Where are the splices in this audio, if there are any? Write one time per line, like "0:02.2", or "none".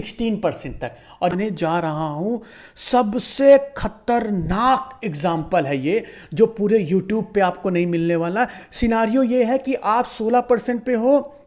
0:01.3